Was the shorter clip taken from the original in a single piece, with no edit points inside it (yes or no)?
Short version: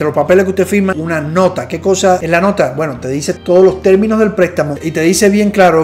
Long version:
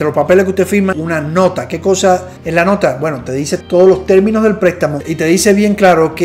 no